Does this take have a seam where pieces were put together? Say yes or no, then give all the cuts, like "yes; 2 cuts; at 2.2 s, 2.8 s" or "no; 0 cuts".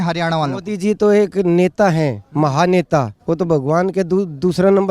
yes; 1 cut; at 3.1 s